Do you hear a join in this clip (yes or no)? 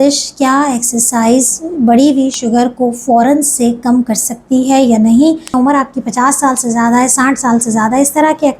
yes